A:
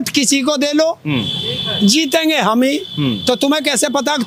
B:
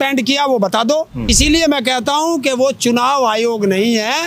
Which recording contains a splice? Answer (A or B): B